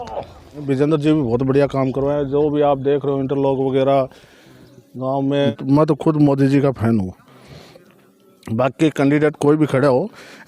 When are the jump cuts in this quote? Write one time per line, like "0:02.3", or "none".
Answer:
0:00.8
0:05.5